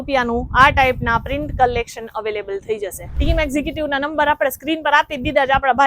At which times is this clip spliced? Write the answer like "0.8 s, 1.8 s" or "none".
3.1 s